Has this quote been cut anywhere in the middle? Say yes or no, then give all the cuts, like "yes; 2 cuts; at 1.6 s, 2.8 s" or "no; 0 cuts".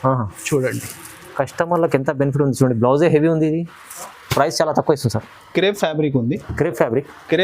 yes; 1 cut; at 5.3 s